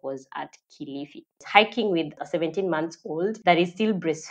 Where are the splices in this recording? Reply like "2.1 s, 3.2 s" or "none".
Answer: 1.4 s, 2.2 s, 3.4 s